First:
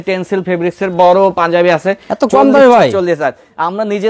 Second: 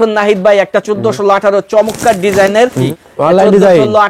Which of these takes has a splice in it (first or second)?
second